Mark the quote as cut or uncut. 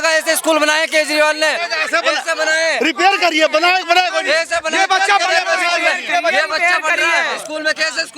uncut